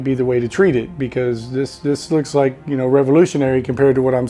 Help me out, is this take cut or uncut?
uncut